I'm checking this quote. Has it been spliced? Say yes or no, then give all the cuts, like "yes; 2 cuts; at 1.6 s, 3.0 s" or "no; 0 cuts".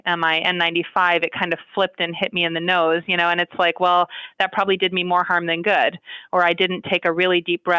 no; 0 cuts